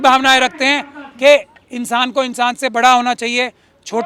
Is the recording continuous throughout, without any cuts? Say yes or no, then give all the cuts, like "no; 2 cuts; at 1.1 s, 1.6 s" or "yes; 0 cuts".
yes; 0 cuts